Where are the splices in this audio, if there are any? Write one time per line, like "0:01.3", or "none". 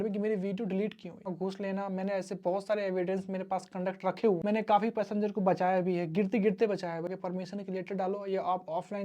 0:01.3
0:04.4
0:07.1